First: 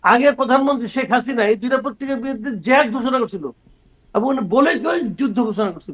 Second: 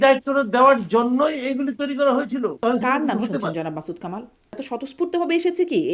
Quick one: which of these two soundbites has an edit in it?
second; 2 cuts; at 2.6 s, 4.7 s

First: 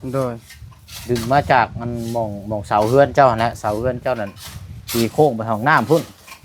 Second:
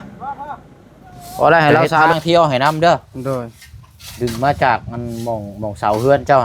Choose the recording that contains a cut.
second; 1 cut; at 2.1 s

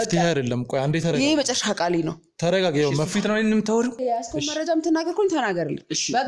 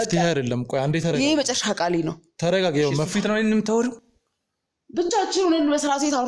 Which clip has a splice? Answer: first; 1 cut; at 4.0 s

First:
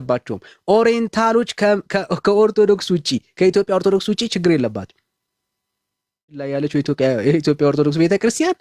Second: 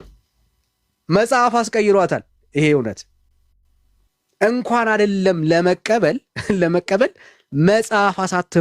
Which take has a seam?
first; 1 cut; at 6.5 s

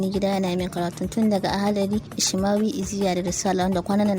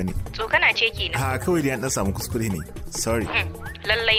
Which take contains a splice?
first; 1 cut; at 2.2 s

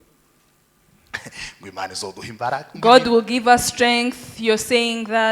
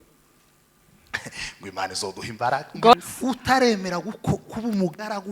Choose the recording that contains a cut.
second; 1 cut; at 2.9 s

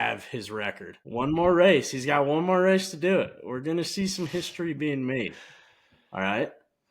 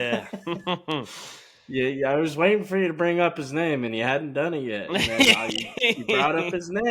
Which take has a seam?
first; 1 cut; at 0.9 s

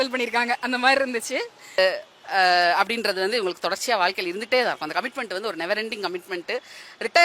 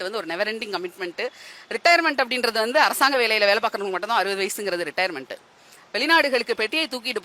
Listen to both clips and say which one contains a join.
first; 1 cut; at 1.8 s

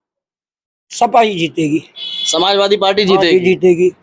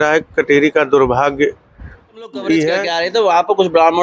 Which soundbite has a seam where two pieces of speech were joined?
second; 1 cut; at 2.9 s

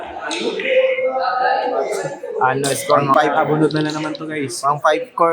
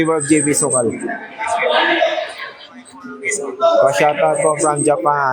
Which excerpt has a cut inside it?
first; 1 cut; at 3.1 s

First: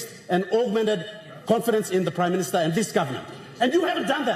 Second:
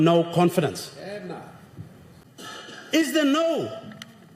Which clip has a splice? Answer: second; 1 cut; at 2.4 s

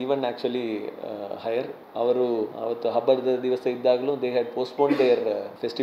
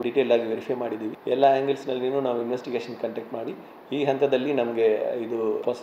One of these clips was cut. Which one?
second; 1 cut; at 1.1 s

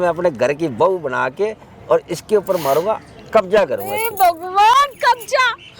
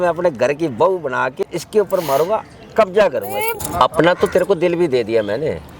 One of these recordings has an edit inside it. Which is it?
second; 2 cuts; at 1.4 s, 3.5 s

